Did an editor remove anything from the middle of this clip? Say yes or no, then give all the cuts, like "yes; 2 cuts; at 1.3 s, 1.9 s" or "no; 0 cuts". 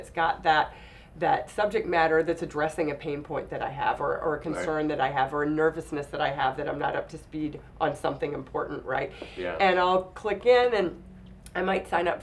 no; 0 cuts